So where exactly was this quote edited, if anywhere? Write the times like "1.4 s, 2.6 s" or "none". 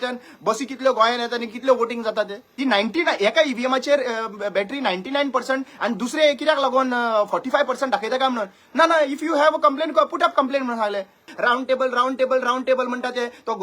2.5 s, 11.3 s